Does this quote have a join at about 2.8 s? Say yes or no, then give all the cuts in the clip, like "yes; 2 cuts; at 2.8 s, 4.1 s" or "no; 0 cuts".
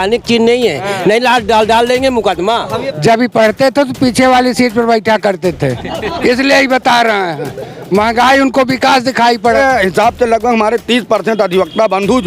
yes; 2 cuts; at 2.8 s, 9.6 s